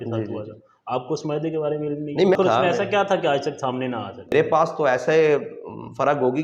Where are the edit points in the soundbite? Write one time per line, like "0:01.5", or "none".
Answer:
0:02.4
0:04.3